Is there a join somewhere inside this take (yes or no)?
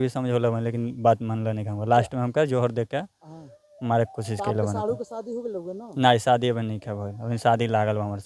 no